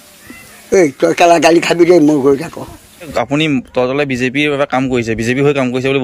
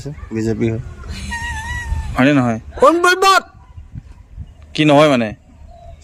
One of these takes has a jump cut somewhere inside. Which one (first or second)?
first